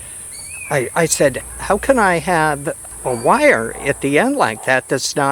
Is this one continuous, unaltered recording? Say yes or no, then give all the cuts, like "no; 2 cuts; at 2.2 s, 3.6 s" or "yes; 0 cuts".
no; 2 cuts; at 1.4 s, 2.9 s